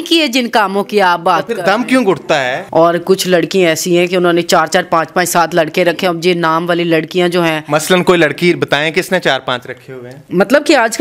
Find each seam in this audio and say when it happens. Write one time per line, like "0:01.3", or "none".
0:02.6